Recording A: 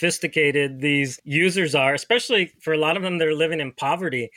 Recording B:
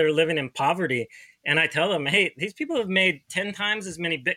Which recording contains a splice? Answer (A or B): A